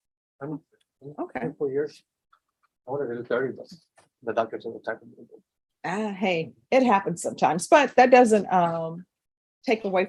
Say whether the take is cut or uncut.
uncut